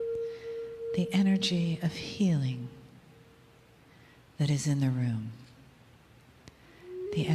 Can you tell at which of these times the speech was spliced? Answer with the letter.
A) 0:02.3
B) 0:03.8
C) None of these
A